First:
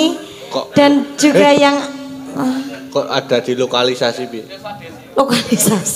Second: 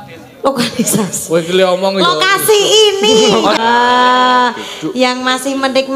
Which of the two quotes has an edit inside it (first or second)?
second